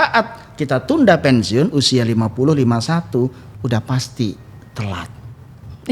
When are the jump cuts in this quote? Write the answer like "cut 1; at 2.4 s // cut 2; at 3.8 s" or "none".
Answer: none

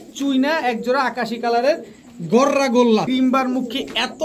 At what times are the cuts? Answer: cut 1; at 3.1 s

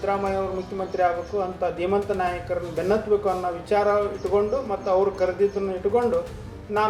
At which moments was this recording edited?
none

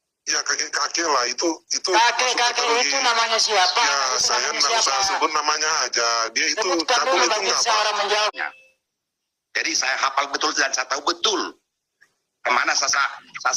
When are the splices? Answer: cut 1; at 8.3 s

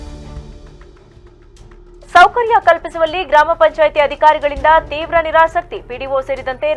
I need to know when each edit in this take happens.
none

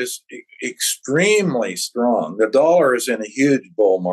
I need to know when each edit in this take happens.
none

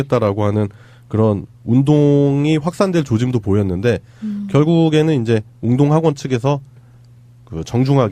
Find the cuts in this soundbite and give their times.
cut 1; at 6.1 s

